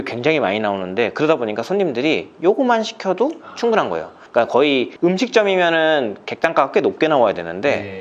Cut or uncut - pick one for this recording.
uncut